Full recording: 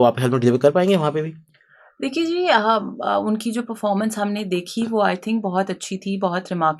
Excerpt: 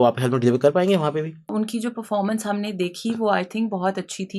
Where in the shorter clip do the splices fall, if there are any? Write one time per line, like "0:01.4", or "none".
0:01.5

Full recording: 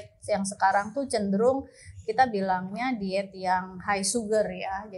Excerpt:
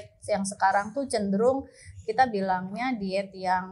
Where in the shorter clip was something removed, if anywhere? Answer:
none

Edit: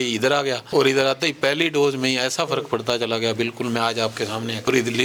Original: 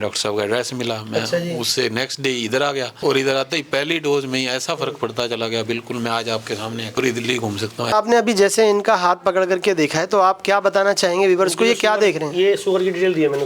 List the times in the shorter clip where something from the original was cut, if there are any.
none

